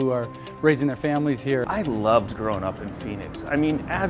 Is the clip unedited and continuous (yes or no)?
no